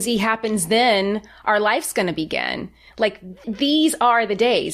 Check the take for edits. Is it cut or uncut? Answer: uncut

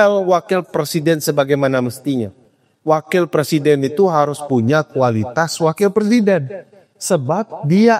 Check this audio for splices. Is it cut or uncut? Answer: uncut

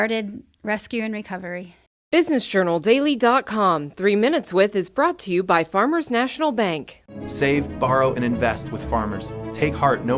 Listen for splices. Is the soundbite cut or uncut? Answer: cut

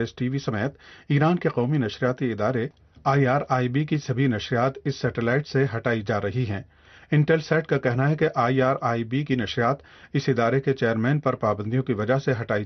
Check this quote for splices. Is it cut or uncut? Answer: uncut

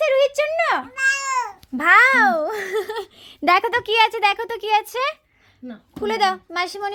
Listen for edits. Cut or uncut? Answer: uncut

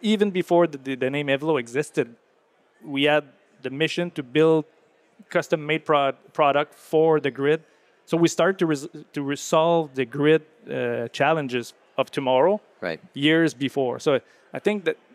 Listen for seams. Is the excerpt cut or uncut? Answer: uncut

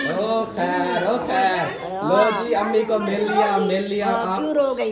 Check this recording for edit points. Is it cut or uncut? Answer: uncut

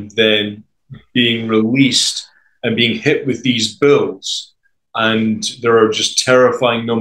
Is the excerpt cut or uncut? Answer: uncut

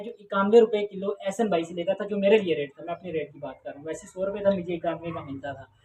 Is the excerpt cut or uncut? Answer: uncut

